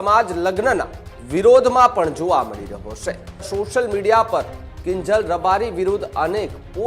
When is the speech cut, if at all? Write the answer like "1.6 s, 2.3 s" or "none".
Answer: 3.5 s